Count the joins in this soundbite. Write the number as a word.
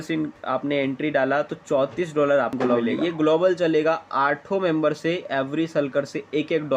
one